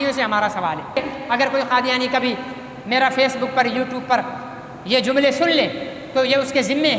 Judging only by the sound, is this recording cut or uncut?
cut